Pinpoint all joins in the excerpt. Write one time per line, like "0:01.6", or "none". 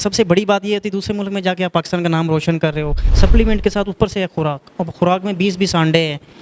0:03.0